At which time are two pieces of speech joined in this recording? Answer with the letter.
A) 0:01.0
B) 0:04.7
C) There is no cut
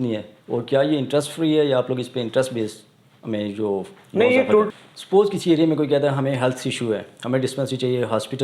B